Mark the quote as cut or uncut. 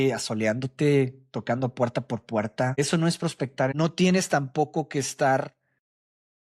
cut